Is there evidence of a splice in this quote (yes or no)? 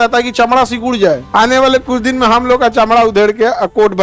yes